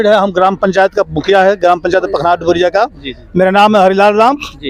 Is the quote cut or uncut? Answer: uncut